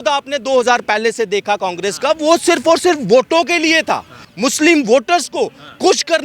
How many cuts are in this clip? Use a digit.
1